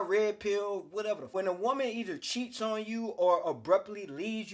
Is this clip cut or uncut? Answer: cut